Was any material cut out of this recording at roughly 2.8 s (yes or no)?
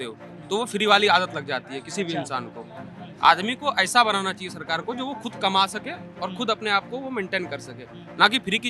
no